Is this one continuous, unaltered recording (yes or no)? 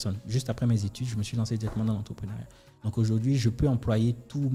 yes